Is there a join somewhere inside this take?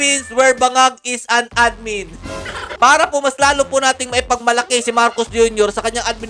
yes; 1 cut; at 2.7 s

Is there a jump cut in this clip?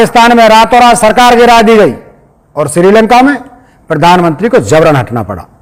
no; 0 cuts

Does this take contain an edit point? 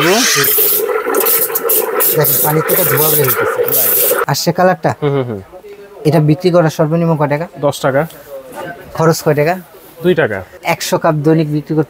yes; 2 cuts; at 4.2 s, 10.5 s

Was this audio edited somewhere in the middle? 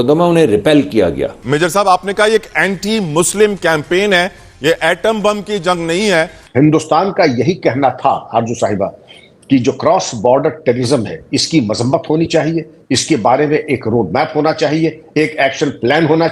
yes; 2 cuts; at 1.4 s, 6.4 s

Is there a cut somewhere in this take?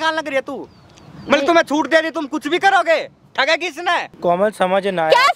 yes; 1 cut; at 4.1 s

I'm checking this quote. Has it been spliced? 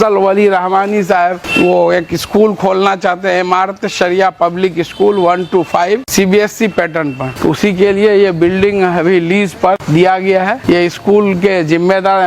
yes; 5 cuts; at 1.4 s, 6.1 s, 7.3 s, 9.8 s, 10.6 s

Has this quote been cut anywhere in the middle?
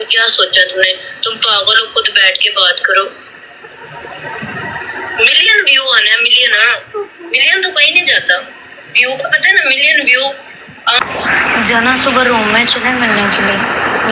yes; 1 cut; at 11.0 s

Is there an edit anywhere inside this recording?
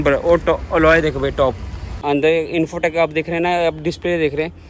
yes; 1 cut; at 1.9 s

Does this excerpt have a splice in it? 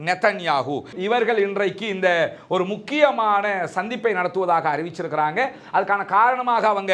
yes; 1 cut; at 0.9 s

